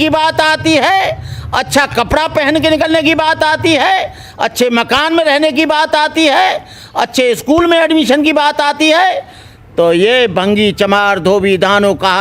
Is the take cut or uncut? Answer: uncut